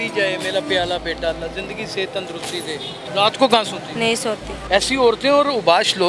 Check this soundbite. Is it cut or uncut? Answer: cut